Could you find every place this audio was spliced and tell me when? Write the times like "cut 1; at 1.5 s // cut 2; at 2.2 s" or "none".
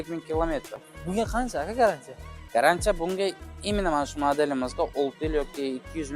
cut 1; at 0.9 s